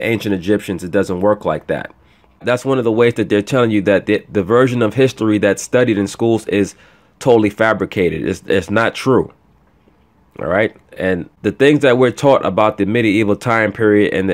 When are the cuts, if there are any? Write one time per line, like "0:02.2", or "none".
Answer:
0:02.4
0:11.3